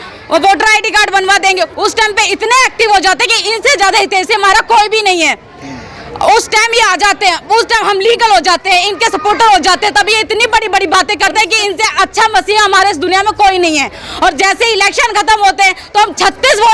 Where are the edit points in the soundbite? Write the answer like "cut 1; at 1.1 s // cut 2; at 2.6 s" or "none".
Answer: none